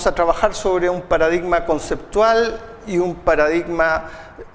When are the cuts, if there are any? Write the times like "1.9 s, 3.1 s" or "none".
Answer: 3.3 s